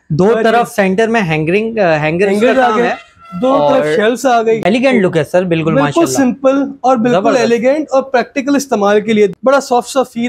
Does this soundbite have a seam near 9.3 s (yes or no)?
yes